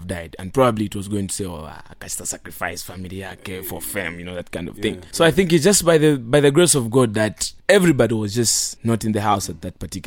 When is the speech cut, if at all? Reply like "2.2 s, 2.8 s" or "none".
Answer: 5.1 s, 7.5 s, 8.7 s